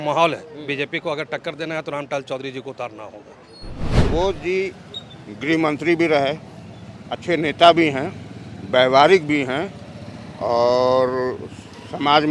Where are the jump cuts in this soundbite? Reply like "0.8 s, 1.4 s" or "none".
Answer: 3.8 s